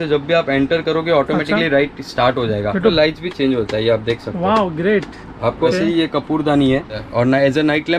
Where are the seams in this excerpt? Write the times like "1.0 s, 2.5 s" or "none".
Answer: 2.9 s, 5.7 s, 7.0 s